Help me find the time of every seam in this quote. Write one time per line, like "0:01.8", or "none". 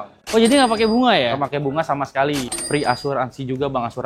0:02.5